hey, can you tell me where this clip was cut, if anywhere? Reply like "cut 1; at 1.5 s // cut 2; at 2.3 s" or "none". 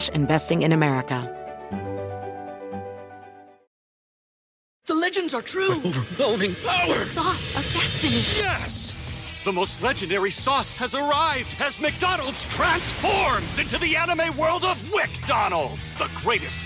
cut 1; at 1.2 s